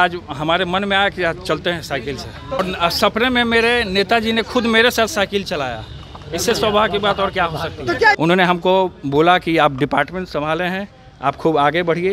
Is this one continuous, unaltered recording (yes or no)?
no